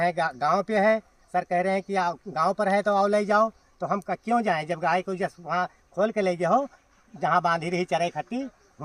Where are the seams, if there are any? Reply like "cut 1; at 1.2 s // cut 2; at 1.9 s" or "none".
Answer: none